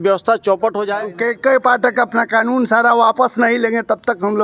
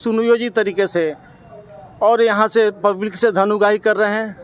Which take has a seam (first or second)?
first